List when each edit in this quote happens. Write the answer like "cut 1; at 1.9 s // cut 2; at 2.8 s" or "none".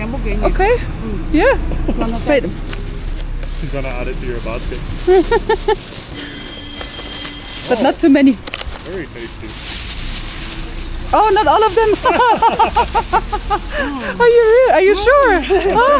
none